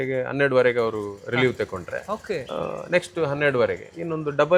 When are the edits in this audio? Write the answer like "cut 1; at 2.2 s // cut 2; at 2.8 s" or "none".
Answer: none